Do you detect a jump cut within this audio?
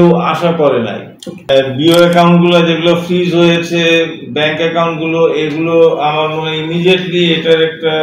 yes; 1 cut; at 1.5 s

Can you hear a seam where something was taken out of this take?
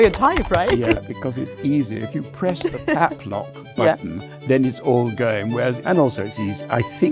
yes; 2 cuts; at 1.0 s, 5.8 s

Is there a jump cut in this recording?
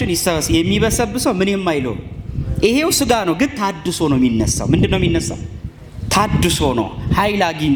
no; 0 cuts

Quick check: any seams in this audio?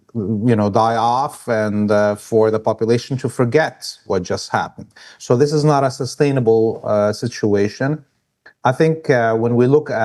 no; 0 cuts

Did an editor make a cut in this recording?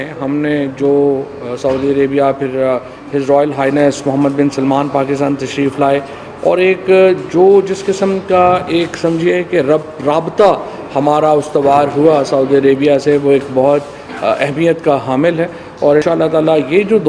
yes; 1 cut; at 16.0 s

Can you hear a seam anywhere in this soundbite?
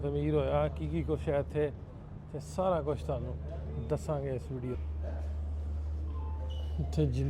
yes; 1 cut; at 4.7 s

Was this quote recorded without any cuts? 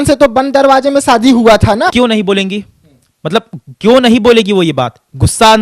no; 1 cut; at 1.9 s

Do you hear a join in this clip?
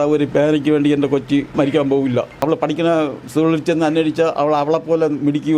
yes; 2 cuts; at 1.5 s, 2.4 s

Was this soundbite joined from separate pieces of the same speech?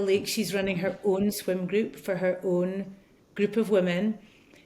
no; 0 cuts

